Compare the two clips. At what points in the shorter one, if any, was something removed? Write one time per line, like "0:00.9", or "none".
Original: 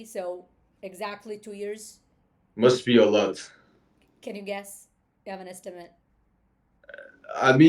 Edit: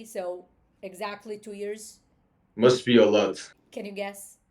0:03.5